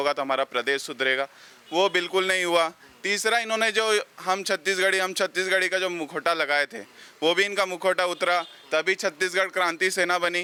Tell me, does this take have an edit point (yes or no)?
no